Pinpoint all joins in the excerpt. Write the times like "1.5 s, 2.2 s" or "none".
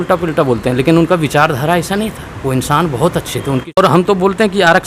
3.7 s